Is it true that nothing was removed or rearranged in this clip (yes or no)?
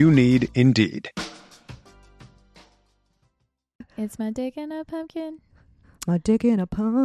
no